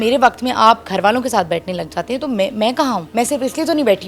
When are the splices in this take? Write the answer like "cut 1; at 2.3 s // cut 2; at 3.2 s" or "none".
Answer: cut 1; at 3.1 s